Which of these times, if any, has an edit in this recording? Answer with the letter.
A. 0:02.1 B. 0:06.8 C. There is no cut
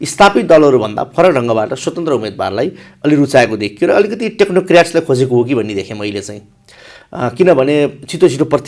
C